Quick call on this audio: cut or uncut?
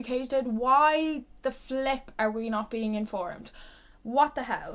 uncut